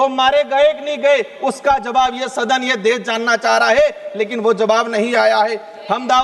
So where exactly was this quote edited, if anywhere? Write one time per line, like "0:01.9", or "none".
none